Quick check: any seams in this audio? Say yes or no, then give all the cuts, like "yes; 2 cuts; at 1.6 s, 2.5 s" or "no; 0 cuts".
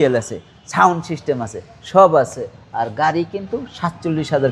no; 0 cuts